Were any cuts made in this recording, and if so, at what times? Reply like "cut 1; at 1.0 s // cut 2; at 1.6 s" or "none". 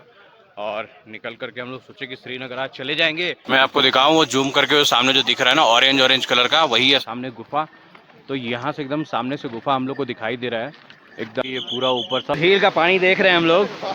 cut 1; at 3.4 s // cut 2; at 12.4 s